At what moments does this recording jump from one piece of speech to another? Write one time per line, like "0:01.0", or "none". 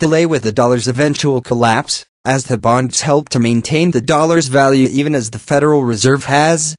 0:05.5